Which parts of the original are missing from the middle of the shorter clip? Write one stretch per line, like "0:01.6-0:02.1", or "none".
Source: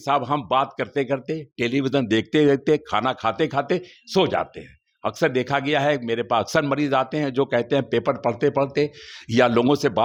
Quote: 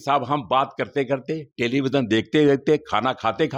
none